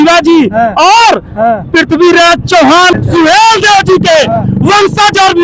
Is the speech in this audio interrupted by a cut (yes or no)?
yes